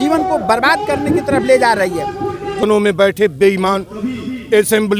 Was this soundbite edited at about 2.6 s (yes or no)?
yes